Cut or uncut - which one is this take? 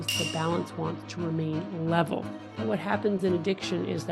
cut